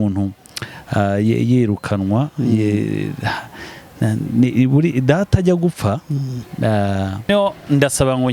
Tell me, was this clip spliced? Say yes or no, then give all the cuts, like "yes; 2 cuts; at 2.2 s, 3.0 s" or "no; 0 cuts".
yes; 1 cut; at 7.3 s